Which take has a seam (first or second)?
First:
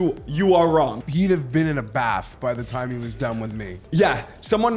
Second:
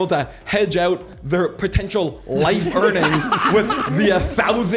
first